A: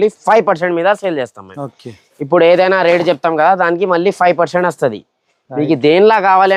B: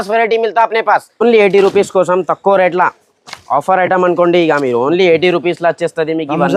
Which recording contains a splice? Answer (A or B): B